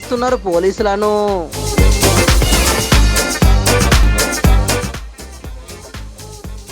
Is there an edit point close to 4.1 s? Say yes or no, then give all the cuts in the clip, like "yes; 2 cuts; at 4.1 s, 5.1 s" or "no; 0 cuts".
yes; 1 cut; at 4.1 s